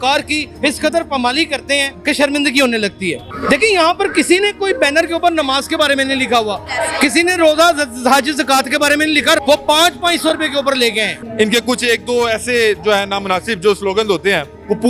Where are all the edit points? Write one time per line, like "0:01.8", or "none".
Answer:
0:03.2
0:09.4
0:11.2

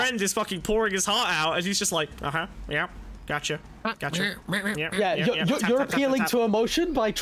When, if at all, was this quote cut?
none

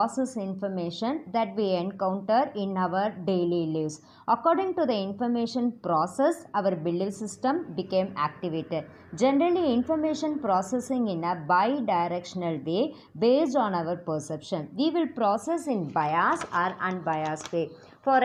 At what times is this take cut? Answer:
none

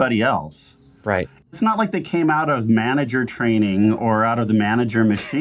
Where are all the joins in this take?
none

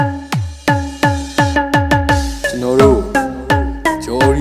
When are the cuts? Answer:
0:02.0

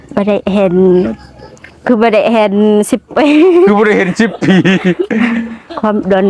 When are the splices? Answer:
none

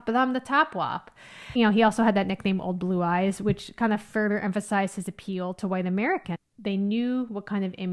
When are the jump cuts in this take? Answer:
0:01.5
0:06.3

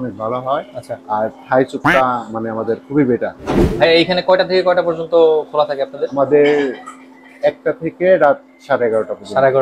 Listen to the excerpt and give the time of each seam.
0:03.7

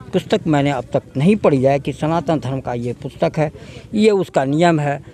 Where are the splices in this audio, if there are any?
none

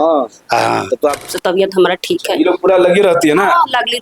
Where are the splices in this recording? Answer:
0:01.0

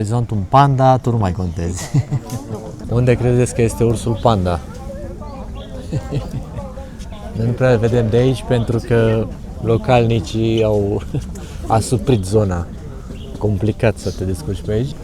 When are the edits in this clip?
none

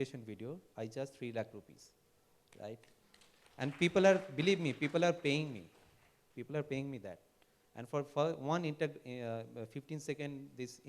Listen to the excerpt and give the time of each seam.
none

